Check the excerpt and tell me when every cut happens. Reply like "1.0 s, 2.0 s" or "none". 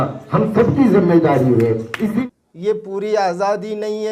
2.2 s